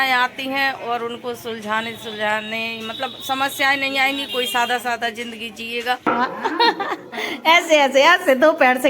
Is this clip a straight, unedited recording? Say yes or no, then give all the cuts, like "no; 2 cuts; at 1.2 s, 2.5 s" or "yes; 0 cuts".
no; 1 cut; at 6.1 s